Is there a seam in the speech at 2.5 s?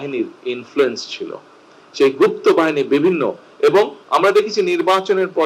no; 1 cut; at 4.0 s

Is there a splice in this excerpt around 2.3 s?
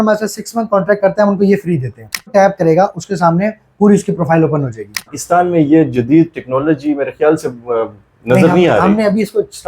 yes; 2 cuts; at 2.3 s, 5.2 s

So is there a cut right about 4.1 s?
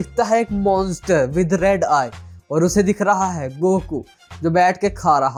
no; 0 cuts

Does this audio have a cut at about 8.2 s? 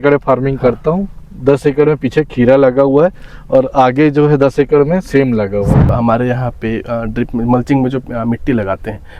no; 1 cut; at 5.9 s

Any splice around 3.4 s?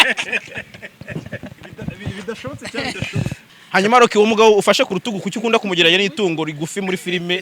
yes; 1 cut; at 3.4 s

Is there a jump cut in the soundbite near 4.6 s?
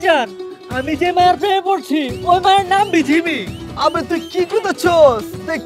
no; 0 cuts

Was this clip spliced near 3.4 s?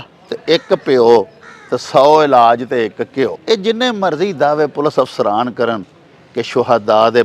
yes; 1 cut; at 3.4 s

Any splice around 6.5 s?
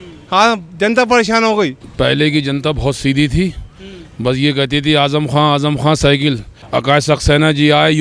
yes; 2 cuts; at 1.8 s, 6.5 s

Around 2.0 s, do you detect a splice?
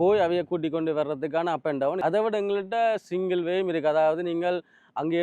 yes; 1 cut; at 2.0 s

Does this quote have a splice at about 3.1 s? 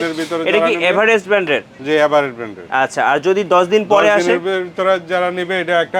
no; 0 cuts

